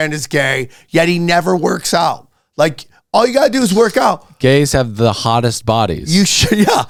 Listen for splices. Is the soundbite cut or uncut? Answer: uncut